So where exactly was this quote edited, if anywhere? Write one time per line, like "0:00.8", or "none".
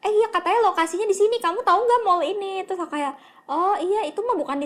none